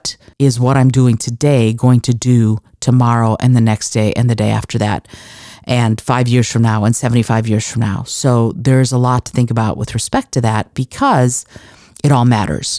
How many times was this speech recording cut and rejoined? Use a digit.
0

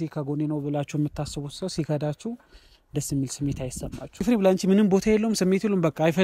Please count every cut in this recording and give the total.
1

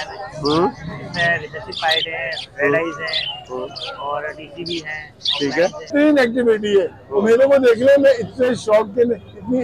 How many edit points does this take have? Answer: 1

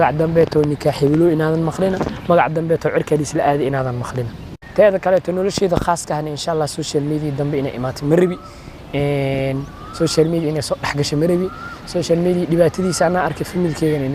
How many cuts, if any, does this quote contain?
1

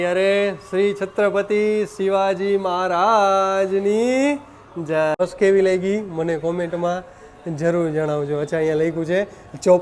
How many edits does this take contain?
1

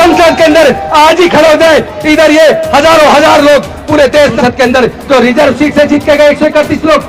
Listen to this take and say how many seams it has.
1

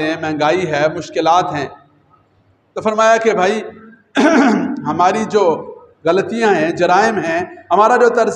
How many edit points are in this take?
0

